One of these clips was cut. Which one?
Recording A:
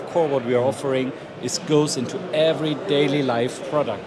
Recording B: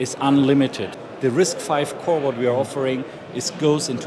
B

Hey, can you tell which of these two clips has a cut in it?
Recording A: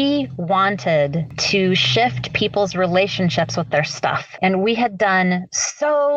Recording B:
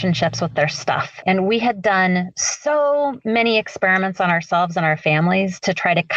A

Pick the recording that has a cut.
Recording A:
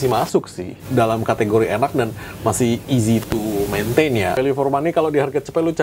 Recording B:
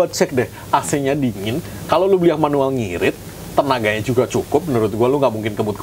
A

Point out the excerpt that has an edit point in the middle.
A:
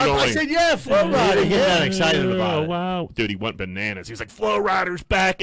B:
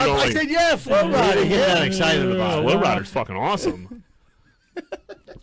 B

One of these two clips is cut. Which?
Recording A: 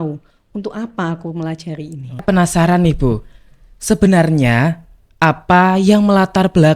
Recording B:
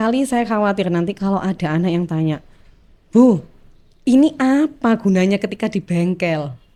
A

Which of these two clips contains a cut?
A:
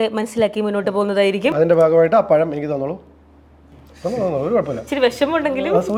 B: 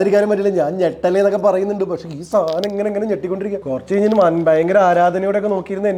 B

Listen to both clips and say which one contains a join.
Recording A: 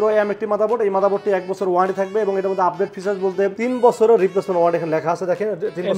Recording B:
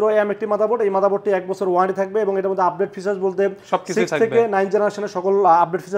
A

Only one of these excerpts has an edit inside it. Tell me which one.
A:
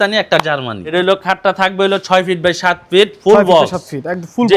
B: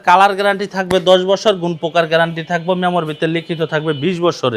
A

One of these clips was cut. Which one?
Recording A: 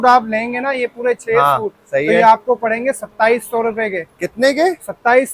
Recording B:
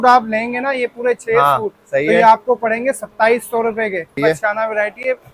B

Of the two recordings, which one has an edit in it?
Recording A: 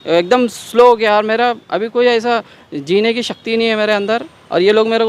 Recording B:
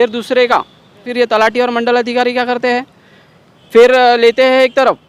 B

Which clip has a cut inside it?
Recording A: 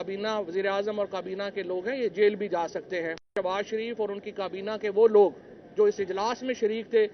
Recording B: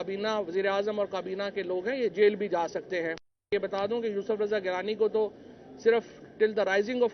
A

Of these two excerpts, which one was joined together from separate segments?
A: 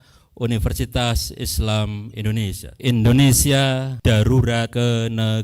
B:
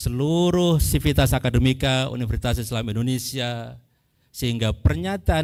A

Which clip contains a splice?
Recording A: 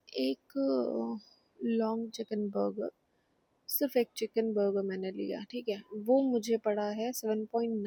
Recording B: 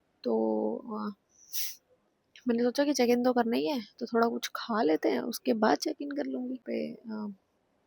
B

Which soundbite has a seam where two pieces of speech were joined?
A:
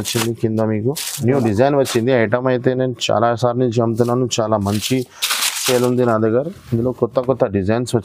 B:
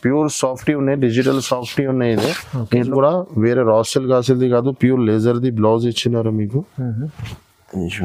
B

